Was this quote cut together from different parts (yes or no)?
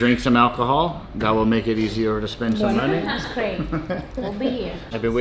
no